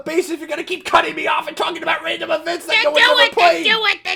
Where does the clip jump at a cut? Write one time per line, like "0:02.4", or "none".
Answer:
none